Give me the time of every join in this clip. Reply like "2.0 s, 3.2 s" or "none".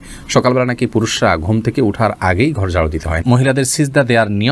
3.2 s